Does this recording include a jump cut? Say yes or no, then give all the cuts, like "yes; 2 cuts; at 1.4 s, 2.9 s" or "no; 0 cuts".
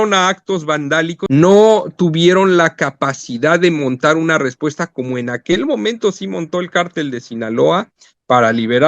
yes; 1 cut; at 1.2 s